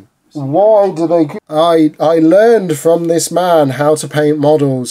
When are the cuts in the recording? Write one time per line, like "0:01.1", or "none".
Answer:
0:01.4